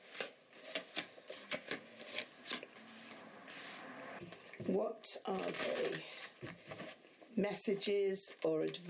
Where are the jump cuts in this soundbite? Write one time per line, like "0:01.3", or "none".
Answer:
0:04.2